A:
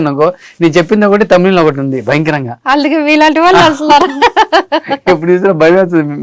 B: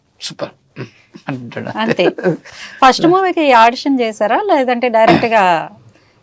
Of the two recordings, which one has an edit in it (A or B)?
B